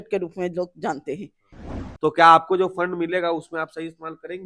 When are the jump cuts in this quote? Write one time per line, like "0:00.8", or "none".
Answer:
0:01.6